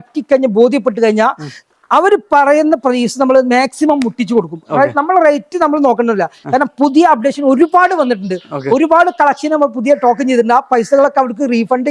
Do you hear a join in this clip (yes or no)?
no